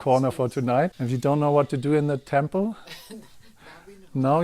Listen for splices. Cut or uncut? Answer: cut